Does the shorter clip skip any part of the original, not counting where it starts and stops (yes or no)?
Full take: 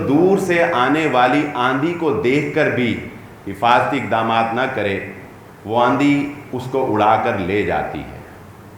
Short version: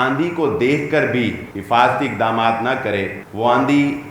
yes